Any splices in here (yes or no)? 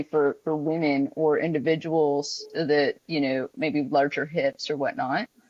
no